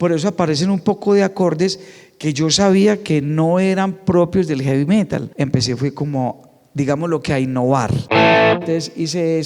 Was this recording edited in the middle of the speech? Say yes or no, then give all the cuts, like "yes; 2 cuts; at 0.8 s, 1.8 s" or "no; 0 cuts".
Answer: yes; 2 cuts; at 5.3 s, 8.0 s